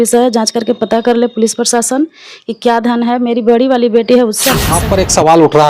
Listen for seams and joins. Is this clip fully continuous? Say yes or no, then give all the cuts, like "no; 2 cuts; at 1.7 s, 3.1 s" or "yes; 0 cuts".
no; 1 cut; at 4.8 s